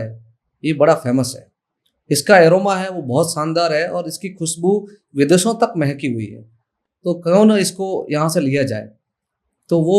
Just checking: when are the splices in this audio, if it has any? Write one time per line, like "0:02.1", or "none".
none